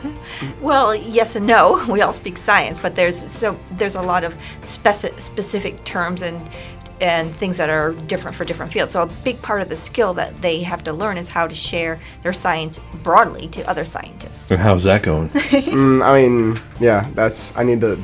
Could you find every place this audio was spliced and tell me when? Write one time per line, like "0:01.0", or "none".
0:14.4

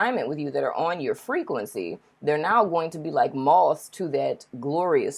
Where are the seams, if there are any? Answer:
none

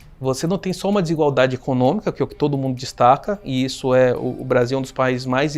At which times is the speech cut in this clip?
none

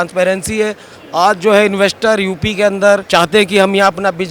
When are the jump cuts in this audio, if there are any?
0:03.0

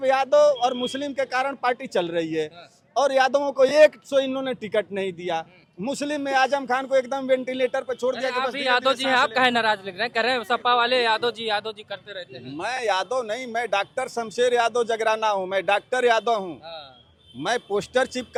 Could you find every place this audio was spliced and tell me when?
none

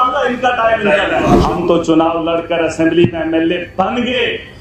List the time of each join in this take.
0:01.4

